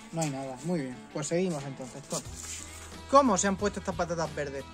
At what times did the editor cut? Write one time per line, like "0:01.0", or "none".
0:02.9